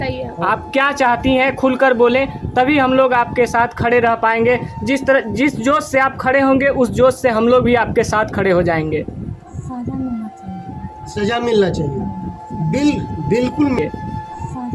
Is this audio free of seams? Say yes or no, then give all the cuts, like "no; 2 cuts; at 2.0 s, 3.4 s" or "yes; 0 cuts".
no; 1 cut; at 13.8 s